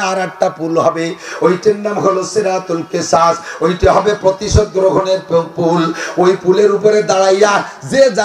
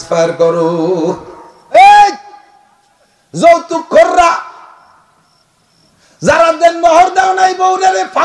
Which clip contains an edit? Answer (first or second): second